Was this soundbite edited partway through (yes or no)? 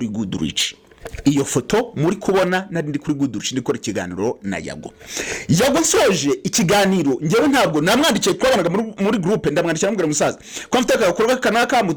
no